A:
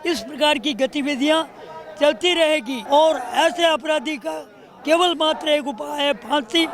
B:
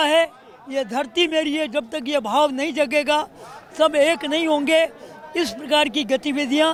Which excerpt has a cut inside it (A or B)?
A